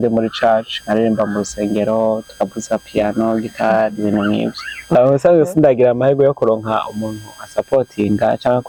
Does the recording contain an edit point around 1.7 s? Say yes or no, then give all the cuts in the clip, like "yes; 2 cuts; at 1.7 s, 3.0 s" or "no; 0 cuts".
no; 1 cut; at 4.9 s